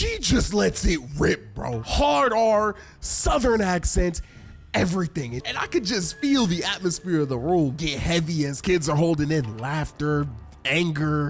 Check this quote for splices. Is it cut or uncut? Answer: cut